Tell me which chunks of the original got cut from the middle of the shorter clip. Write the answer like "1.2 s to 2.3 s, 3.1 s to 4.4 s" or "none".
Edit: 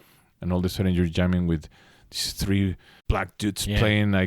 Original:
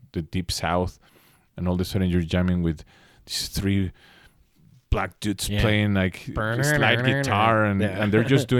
4.1 s to 4.7 s